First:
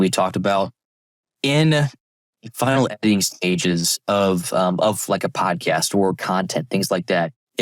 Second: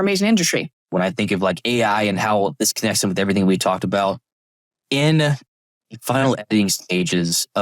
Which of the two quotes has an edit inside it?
second; 1 cut; at 0.9 s

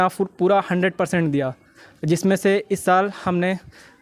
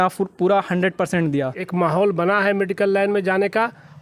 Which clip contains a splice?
second; 1 cut; at 1.6 s

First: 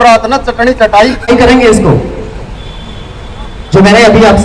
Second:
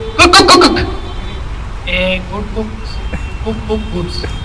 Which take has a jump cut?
first; 1 cut; at 1.3 s

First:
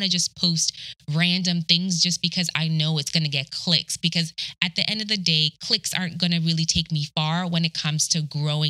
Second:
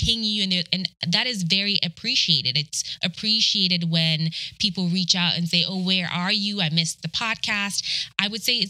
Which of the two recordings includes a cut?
second; 1 cut; at 6.9 s

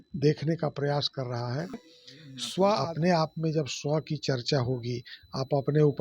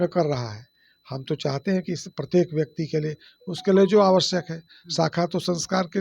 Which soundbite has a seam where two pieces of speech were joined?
first; 1 cut; at 2.8 s

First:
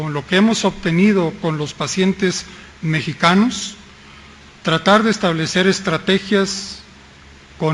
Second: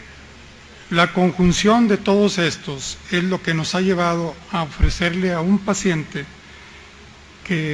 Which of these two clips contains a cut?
second; 1 cut; at 3.7 s

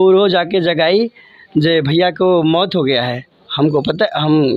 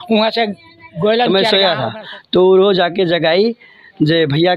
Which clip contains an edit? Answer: second; 1 cut; at 1.3 s

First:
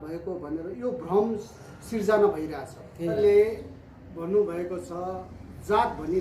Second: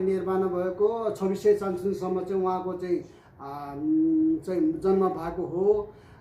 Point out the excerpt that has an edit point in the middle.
first; 1 cut; at 3.1 s

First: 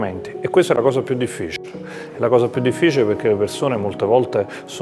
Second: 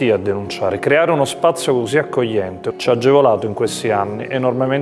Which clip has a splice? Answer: second; 1 cut; at 2.7 s

